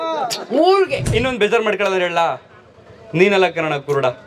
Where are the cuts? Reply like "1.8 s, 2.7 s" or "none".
1.1 s